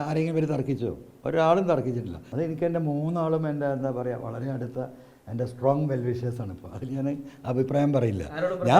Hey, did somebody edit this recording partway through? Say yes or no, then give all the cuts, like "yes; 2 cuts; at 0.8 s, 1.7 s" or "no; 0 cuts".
yes; 1 cut; at 2.2 s